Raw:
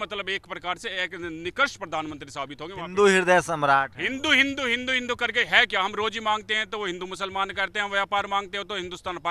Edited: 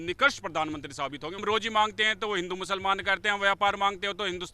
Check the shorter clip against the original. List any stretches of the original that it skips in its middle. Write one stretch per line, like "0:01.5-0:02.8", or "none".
0:02.8-0:05.9